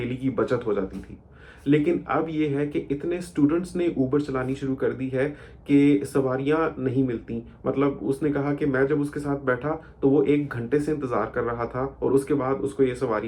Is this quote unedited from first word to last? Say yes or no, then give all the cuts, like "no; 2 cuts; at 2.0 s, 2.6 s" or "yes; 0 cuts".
yes; 0 cuts